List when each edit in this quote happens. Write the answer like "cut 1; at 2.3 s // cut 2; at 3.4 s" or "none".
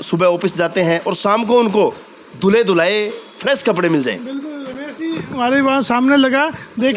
none

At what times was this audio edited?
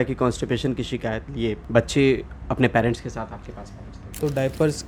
cut 1; at 1.6 s // cut 2; at 4.2 s

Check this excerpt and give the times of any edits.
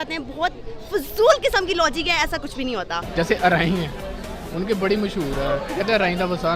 cut 1; at 3.0 s

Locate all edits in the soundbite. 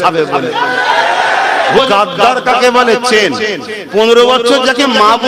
cut 1; at 1.8 s

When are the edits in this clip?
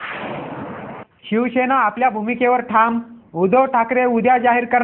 cut 1; at 1.1 s

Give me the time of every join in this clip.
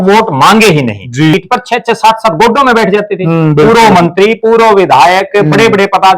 cut 1; at 1.3 s

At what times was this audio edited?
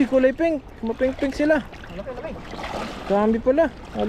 none

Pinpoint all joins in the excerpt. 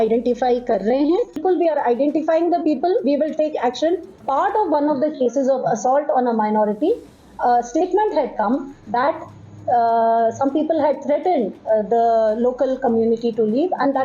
cut 1; at 1.4 s // cut 2; at 4.1 s

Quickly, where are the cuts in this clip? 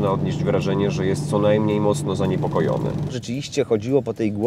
cut 1; at 3.2 s

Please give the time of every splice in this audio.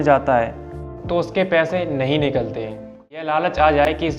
cut 1; at 3.2 s

